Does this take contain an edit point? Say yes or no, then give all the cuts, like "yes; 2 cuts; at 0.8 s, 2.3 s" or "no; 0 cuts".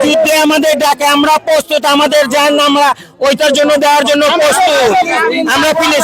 no; 0 cuts